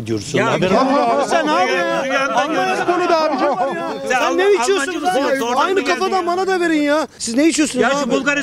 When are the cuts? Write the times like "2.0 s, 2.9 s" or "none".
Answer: none